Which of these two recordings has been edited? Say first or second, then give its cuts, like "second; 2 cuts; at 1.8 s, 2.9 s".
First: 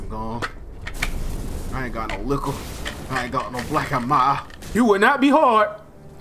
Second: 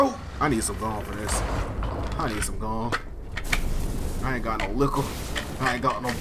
first; 1 cut; at 4.7 s